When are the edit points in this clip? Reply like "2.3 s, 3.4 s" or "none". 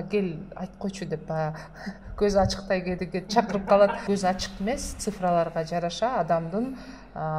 4.0 s

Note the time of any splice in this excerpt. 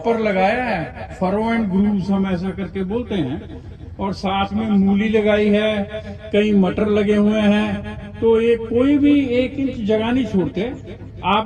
none

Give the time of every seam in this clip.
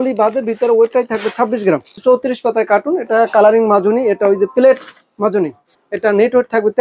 2.0 s, 5.6 s

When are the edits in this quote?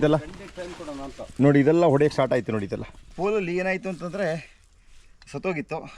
3.0 s

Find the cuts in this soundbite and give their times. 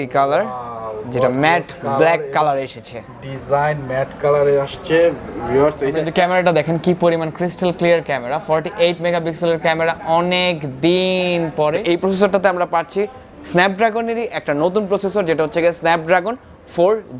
6.1 s, 11.8 s

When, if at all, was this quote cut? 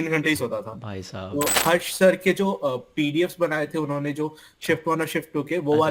1.5 s

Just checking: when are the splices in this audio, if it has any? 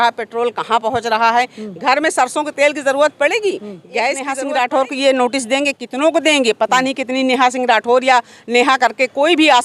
4.3 s

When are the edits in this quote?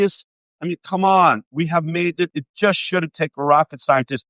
2.3 s

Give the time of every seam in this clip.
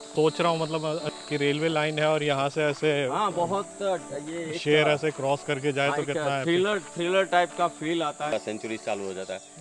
1.1 s, 8.3 s

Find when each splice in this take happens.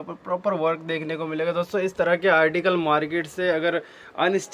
none

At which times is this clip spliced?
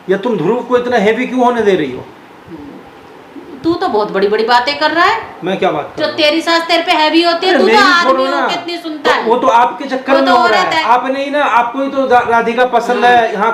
none

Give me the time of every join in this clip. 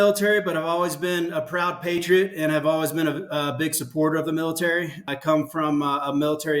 5.0 s

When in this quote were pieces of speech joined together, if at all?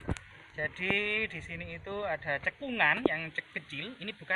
none

